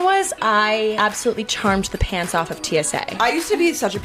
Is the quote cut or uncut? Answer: cut